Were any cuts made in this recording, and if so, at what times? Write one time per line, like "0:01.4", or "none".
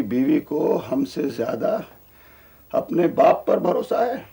none